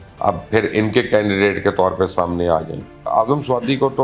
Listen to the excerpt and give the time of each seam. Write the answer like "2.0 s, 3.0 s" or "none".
3.1 s